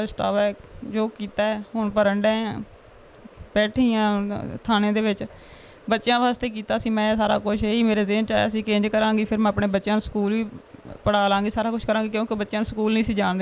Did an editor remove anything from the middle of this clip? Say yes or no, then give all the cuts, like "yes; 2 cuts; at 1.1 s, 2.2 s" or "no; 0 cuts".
no; 0 cuts